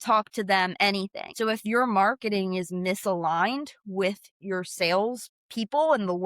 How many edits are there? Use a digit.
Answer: 1